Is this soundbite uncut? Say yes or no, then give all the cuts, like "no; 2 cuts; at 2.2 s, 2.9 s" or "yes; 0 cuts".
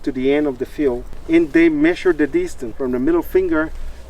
no; 2 cuts; at 1.1 s, 2.6 s